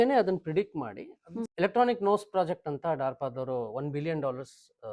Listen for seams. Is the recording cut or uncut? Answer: cut